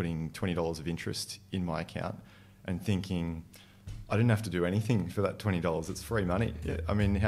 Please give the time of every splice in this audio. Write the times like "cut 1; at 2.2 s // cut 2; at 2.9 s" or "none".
none